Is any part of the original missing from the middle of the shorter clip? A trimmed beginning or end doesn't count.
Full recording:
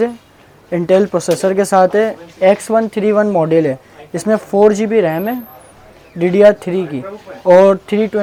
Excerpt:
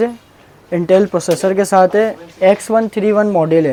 no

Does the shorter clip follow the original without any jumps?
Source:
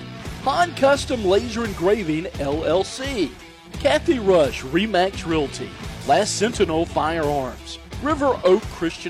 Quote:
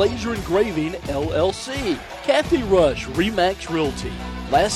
no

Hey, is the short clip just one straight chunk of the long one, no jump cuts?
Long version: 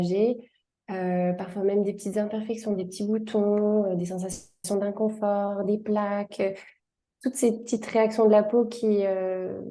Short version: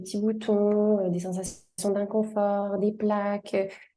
yes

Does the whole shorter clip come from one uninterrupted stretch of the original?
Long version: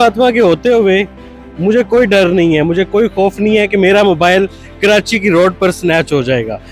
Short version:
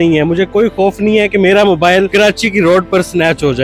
no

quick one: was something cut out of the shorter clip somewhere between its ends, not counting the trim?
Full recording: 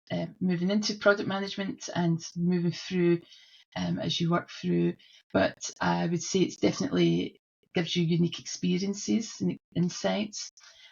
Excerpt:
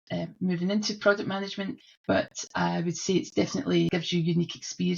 yes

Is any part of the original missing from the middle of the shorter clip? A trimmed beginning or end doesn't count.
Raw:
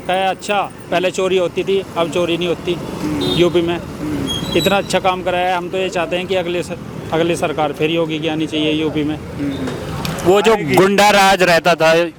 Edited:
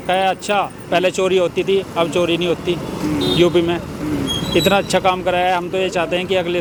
no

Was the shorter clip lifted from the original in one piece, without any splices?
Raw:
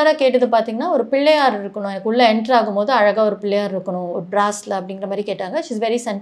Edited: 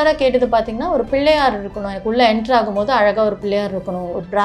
yes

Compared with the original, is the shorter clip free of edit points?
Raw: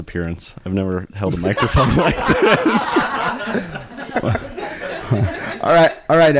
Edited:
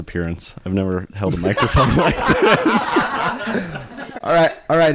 no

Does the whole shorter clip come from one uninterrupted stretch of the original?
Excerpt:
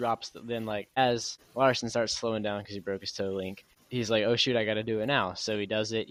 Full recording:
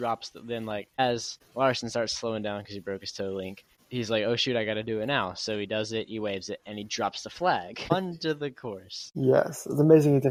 yes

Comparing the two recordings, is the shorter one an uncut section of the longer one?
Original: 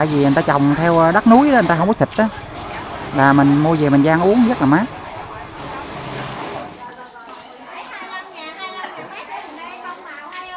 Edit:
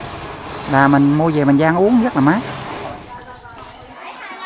no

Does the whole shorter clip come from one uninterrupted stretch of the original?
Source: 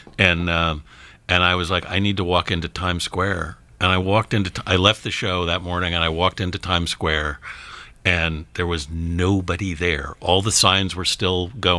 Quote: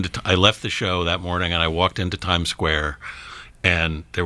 yes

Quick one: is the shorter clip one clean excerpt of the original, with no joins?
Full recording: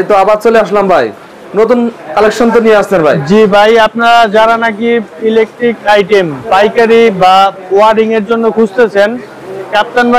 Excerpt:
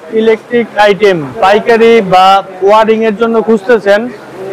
yes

